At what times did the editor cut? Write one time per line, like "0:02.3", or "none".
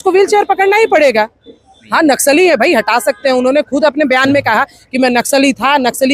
0:01.8